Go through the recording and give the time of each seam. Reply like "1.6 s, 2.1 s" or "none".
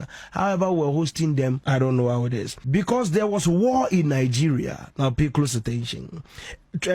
1.6 s, 2.5 s